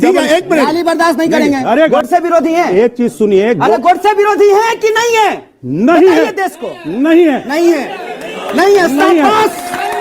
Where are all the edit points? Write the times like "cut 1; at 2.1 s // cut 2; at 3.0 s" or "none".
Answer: cut 1; at 1.9 s